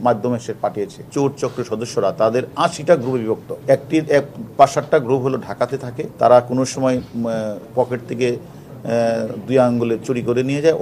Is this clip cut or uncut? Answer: cut